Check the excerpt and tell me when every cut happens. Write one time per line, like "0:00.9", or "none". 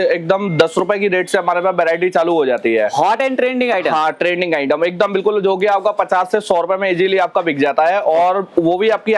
none